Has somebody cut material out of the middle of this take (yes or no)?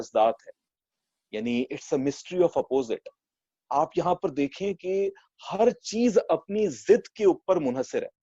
no